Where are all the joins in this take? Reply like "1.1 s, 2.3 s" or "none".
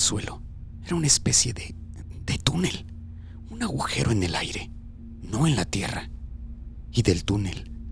none